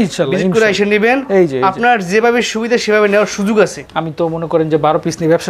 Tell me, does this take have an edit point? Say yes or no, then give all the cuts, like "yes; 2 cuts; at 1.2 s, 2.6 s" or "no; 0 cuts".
yes; 1 cut; at 3.8 s